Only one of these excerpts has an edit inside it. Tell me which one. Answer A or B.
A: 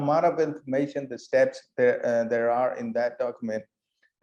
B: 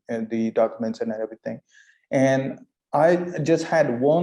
B